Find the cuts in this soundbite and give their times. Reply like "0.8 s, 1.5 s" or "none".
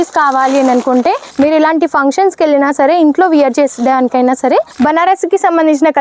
1.2 s, 4.7 s